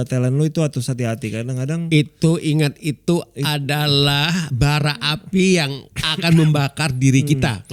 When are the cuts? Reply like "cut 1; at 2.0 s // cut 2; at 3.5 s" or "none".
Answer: none